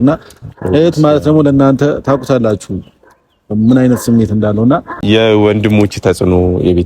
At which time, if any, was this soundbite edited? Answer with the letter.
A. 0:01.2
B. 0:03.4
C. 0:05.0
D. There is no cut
C